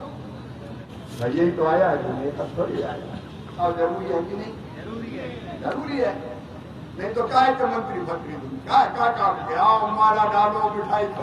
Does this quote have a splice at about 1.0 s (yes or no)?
yes